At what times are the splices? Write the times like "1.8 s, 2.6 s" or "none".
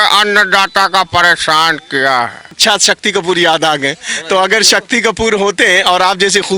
2.6 s